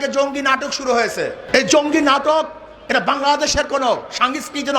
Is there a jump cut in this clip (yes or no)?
yes